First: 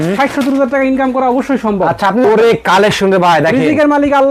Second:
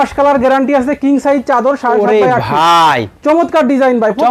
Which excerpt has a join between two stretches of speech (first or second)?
first